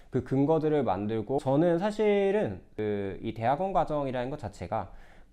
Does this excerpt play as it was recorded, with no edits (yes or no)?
no